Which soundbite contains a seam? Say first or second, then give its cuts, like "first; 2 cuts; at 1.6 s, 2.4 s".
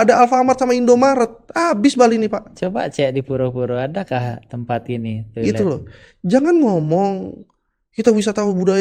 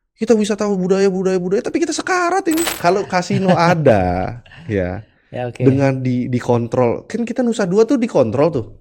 second; 1 cut; at 2.7 s